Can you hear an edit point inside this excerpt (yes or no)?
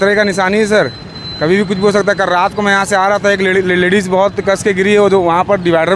no